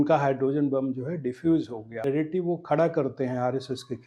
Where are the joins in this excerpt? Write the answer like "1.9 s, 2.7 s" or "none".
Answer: 1.9 s